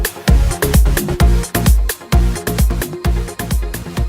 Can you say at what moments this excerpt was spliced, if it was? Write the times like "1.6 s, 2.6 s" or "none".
1.0 s